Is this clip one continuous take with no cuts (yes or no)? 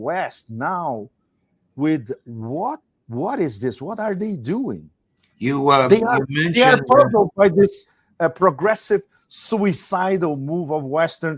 yes